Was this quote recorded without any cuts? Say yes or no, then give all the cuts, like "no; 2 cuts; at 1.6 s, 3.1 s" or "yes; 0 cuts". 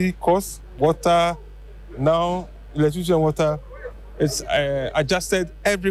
yes; 0 cuts